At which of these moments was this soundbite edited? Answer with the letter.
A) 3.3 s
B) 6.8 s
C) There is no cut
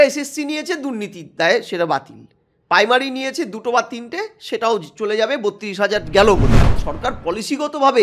B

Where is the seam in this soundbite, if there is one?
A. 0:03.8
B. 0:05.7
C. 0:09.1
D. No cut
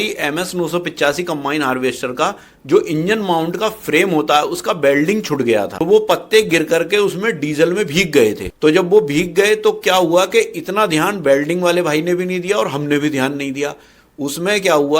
B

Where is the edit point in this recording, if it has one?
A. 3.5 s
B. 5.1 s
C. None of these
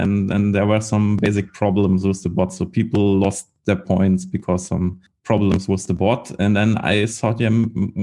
B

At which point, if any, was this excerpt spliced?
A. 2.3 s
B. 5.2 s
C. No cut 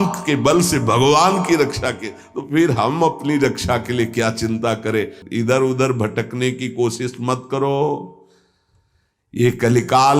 B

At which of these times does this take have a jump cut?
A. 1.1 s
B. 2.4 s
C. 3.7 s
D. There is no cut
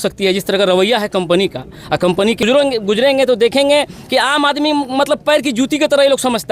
B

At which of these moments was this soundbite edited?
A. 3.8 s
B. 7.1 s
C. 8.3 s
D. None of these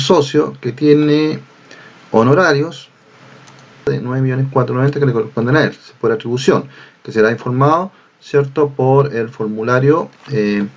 A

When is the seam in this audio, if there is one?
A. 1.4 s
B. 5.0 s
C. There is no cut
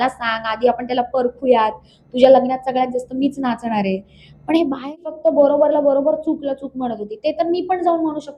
B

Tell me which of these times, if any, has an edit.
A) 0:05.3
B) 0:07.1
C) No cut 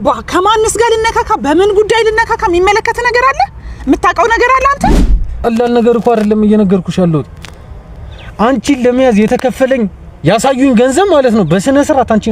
A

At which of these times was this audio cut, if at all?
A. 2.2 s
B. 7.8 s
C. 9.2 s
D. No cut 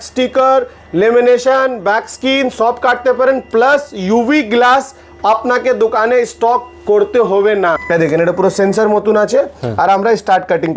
B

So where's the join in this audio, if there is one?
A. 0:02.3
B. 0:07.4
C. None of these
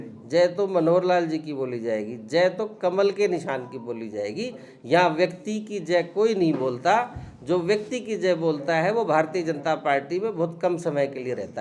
C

